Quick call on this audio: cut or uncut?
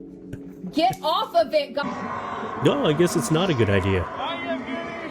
cut